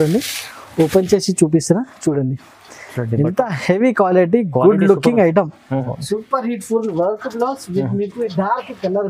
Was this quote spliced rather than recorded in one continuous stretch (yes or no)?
yes